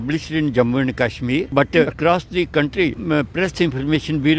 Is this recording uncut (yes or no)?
no